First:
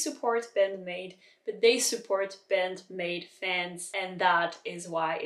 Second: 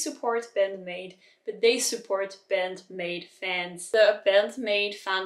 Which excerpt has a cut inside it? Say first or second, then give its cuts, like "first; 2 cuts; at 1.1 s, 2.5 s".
second; 1 cut; at 3.7 s